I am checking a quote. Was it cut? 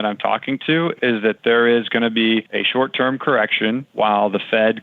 yes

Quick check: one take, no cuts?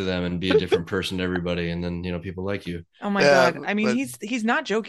yes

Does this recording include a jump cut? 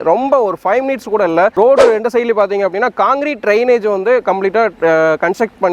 yes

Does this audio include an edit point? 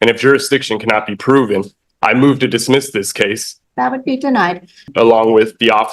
yes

